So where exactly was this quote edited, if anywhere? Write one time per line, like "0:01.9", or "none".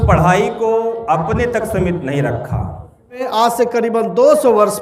0:03.2